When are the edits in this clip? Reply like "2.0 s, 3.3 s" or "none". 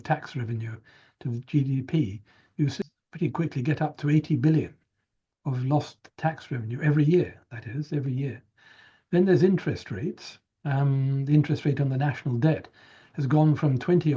3.0 s